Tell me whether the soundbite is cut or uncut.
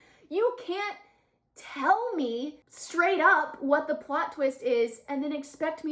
uncut